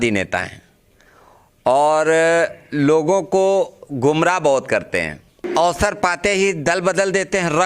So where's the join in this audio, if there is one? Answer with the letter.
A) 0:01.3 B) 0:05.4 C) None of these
B